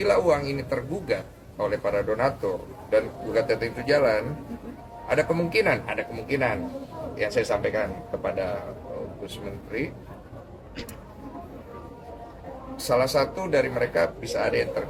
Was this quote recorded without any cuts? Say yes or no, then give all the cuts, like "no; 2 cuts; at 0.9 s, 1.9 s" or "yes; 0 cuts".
yes; 0 cuts